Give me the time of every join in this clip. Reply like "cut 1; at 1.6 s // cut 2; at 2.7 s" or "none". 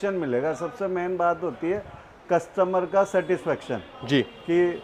none